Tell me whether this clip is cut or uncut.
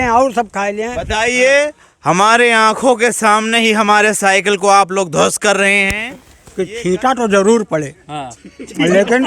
cut